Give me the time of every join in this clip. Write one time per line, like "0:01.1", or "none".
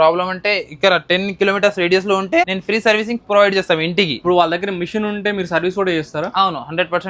0:02.5
0:04.2